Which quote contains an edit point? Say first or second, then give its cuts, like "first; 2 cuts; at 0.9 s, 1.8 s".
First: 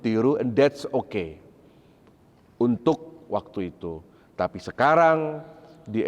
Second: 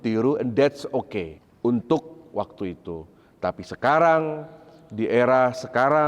second; 1 cut; at 1.4 s